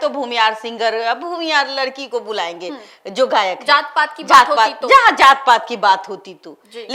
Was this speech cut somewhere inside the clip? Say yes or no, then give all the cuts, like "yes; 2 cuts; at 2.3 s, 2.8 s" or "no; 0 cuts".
no; 0 cuts